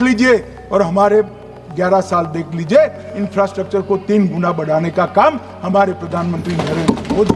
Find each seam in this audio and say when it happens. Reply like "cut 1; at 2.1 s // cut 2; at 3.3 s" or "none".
none